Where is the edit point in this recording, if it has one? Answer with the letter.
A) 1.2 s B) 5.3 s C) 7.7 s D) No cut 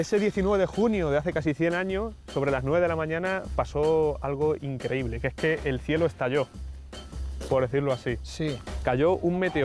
D